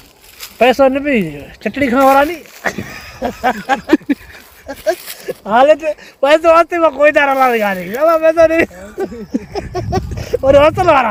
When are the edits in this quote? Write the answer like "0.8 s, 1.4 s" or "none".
none

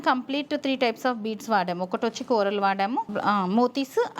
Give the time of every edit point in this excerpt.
3.1 s

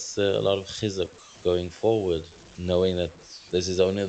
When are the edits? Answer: none

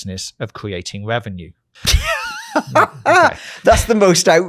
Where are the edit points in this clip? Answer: 1.6 s

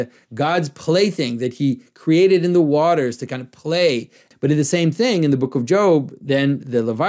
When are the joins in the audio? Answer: 4.3 s

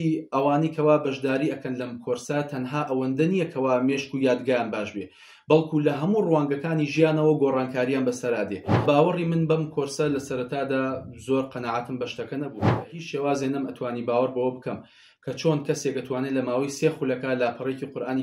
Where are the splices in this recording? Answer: 8.8 s, 12.5 s

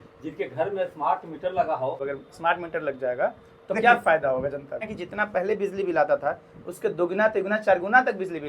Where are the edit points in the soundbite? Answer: 2.0 s, 4.9 s

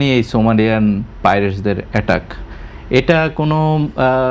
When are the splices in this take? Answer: none

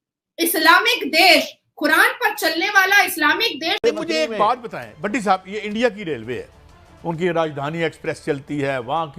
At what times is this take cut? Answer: 3.8 s

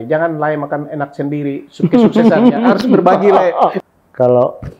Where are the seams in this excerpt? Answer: 3.8 s

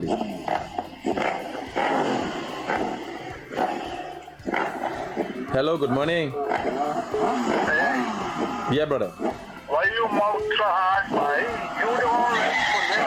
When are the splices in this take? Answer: none

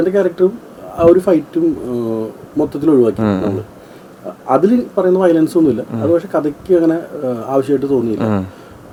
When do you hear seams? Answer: none

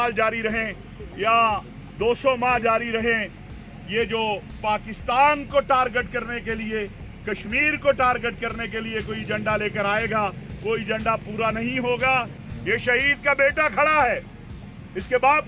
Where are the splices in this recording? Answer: 12.4 s

